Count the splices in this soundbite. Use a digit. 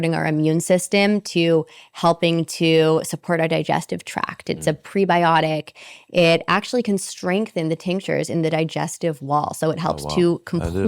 0